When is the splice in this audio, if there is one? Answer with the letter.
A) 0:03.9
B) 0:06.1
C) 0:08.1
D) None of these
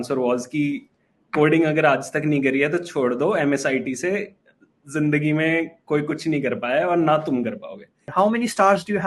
C